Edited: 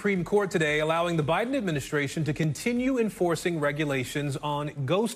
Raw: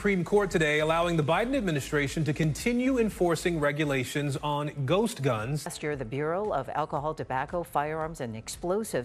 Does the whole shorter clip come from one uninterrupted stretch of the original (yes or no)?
yes